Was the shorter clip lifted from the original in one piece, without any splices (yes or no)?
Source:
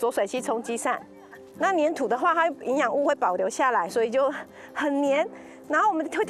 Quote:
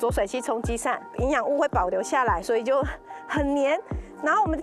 no